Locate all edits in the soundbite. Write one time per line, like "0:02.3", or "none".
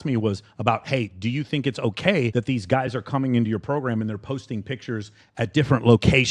0:02.3